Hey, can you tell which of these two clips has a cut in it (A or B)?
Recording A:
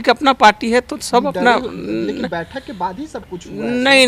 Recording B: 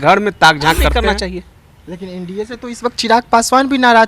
B